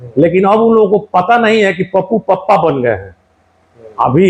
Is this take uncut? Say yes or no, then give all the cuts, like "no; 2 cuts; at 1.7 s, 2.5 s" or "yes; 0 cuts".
yes; 0 cuts